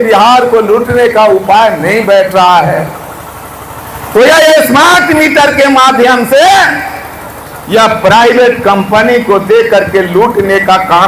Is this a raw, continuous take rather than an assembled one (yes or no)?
yes